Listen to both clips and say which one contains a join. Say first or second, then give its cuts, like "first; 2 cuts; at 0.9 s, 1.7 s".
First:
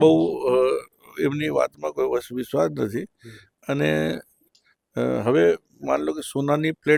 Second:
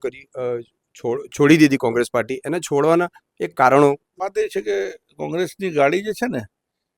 second; 1 cut; at 4.2 s